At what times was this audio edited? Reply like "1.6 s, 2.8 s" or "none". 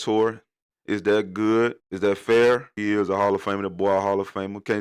1.9 s, 2.8 s